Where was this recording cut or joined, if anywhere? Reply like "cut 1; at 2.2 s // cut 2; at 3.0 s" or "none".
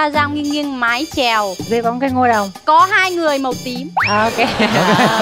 cut 1; at 1.6 s // cut 2; at 3.9 s